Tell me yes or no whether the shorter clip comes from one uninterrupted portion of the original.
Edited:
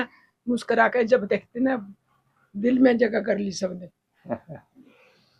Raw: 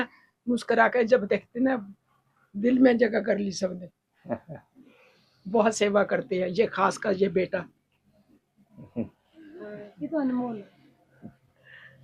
yes